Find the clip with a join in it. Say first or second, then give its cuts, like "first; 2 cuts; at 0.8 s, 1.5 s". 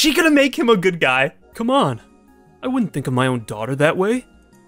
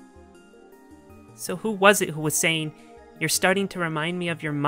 first; 1 cut; at 1.0 s